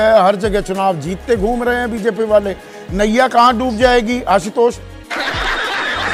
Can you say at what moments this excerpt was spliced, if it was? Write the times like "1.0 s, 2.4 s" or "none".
none